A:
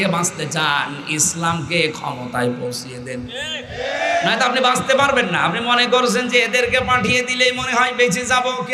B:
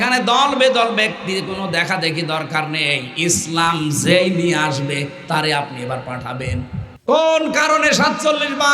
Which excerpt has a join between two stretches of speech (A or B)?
B